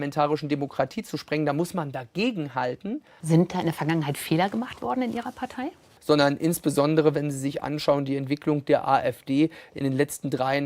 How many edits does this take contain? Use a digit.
2